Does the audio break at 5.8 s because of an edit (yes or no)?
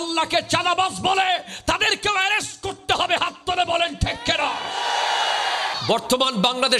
yes